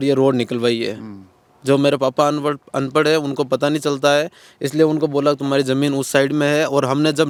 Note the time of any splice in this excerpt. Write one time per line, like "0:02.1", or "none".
none